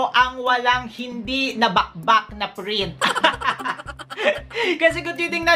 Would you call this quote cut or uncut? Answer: uncut